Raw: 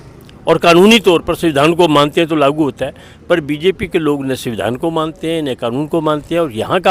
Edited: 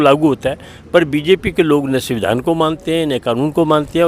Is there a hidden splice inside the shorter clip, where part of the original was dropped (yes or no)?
no